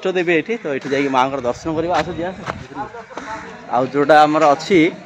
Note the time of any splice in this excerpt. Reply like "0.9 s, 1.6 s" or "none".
none